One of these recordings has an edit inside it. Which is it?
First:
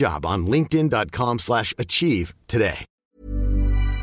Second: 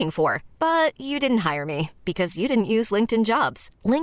first; 1 cut; at 2.9 s

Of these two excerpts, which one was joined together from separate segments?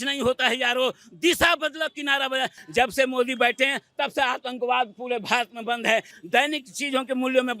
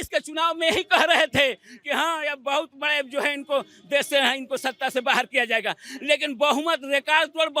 first; 2 cuts; at 2.6 s, 6.1 s

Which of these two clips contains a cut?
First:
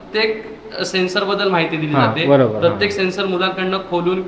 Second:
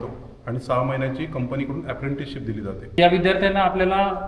second; 1 cut; at 3.0 s

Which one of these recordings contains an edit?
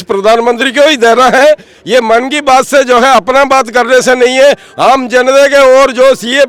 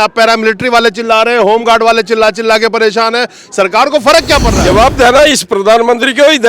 second; 1 cut; at 4.5 s

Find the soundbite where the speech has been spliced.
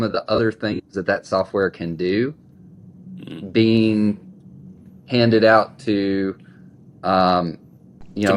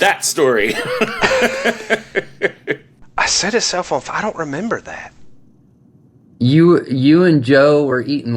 second; 1 cut; at 3.0 s

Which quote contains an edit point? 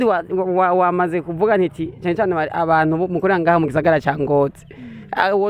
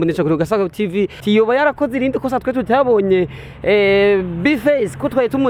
second; 1 cut; at 1.2 s

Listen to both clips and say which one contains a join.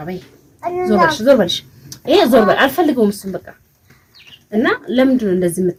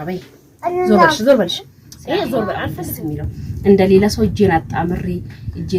second; 1 cut; at 2.8 s

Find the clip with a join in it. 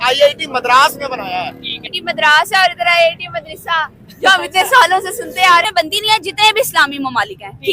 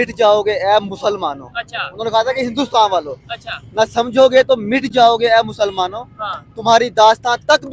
first; 2 cuts; at 2.0 s, 5.6 s

